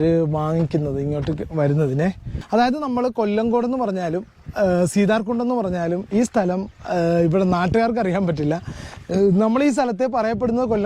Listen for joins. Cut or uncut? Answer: cut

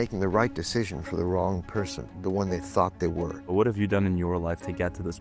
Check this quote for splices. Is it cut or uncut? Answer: cut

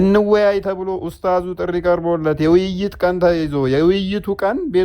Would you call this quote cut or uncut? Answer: uncut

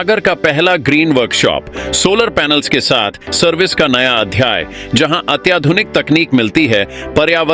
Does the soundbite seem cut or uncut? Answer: uncut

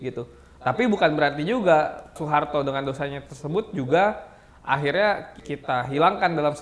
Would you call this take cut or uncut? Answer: cut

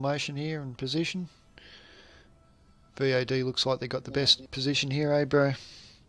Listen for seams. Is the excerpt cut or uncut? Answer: cut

